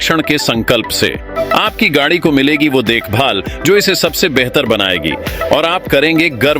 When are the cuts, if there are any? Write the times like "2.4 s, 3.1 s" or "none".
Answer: 1.4 s